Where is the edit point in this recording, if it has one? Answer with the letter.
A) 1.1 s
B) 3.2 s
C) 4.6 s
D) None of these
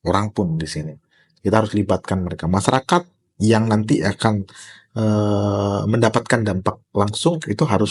D